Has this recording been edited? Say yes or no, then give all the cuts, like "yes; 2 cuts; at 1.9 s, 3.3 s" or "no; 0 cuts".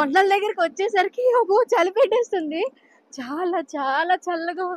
no; 0 cuts